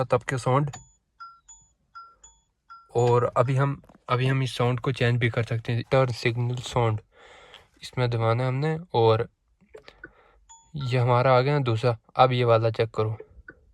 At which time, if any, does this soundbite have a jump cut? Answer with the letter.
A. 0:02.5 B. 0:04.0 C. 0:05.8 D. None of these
C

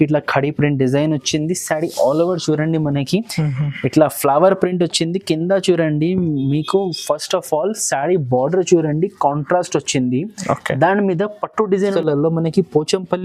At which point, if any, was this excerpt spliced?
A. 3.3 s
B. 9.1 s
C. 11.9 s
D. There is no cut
C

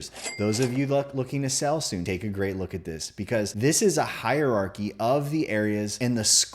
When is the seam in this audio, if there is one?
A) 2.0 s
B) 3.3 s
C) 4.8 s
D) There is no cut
A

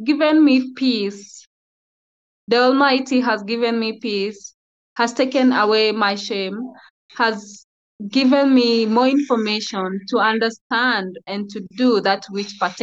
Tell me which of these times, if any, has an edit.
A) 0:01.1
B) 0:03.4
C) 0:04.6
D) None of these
D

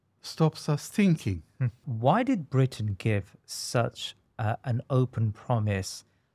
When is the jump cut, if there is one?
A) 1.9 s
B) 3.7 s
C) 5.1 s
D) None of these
A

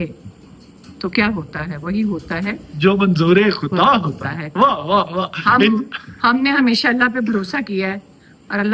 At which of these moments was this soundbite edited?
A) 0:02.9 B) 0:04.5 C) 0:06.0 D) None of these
D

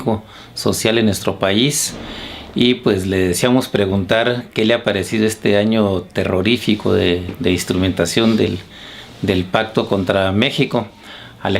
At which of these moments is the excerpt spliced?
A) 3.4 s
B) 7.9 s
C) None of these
A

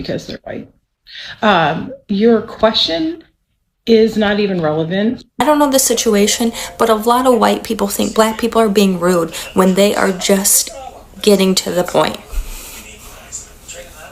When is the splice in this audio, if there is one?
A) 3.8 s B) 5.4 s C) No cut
B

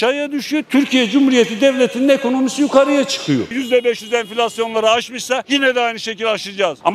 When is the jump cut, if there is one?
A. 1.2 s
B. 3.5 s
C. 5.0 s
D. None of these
B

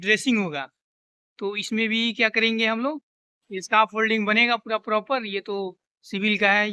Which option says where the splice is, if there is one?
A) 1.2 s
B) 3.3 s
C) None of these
C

